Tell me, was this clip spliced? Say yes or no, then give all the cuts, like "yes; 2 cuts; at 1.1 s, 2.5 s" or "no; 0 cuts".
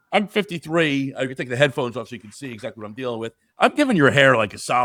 no; 0 cuts